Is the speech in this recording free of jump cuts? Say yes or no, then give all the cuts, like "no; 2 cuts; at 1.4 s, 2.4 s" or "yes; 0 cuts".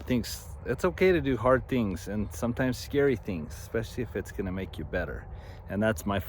yes; 0 cuts